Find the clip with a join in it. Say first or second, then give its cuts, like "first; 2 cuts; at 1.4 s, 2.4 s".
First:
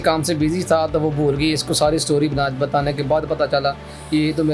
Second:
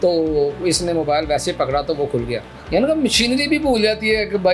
second; 1 cut; at 2.5 s